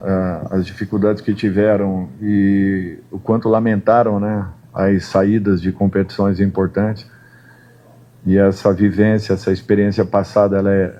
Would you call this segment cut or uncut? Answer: uncut